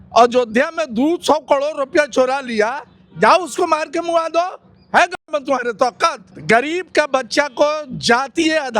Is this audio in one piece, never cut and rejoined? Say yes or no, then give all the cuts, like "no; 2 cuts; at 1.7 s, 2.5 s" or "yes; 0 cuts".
no; 1 cut; at 6.3 s